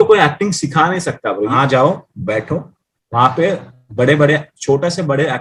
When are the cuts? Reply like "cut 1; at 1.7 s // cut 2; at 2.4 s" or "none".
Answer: cut 1; at 1.5 s